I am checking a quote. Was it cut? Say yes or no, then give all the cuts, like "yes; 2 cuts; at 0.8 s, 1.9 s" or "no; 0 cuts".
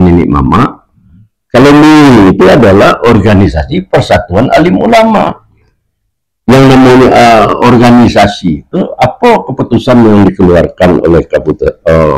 no; 0 cuts